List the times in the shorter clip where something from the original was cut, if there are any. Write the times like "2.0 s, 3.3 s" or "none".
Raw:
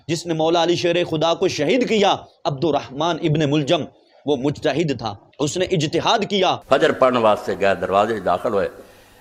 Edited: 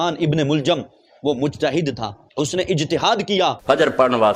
none